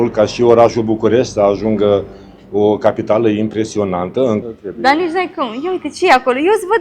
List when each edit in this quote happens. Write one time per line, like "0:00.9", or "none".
0:04.4